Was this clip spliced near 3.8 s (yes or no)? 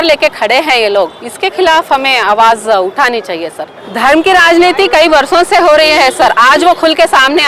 yes